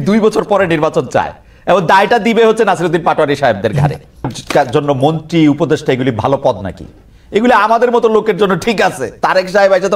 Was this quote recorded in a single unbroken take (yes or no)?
no